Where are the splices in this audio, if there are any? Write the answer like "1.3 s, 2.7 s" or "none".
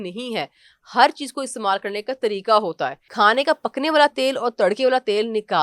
3.0 s